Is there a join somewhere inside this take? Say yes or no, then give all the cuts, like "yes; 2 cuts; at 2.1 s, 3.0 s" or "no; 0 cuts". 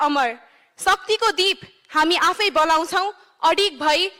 no; 0 cuts